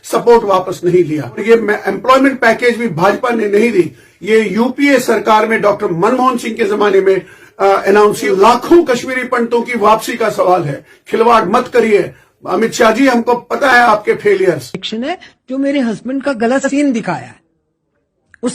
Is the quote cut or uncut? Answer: cut